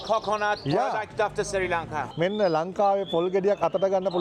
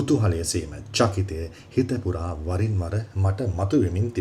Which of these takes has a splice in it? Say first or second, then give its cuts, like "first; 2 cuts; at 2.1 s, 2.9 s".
first; 1 cut; at 2.0 s